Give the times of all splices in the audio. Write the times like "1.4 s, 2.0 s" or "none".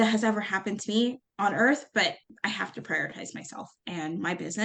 1.3 s, 2.3 s